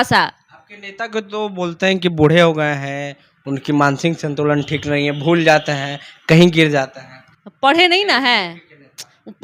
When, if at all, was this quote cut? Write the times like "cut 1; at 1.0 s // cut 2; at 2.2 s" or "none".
none